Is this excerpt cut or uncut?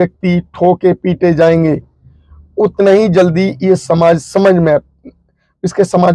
uncut